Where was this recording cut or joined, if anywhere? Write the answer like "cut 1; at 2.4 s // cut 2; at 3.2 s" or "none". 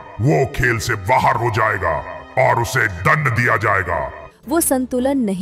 cut 1; at 4.2 s